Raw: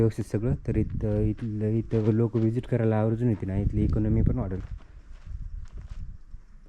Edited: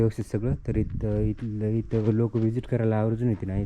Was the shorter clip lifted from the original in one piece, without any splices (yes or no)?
yes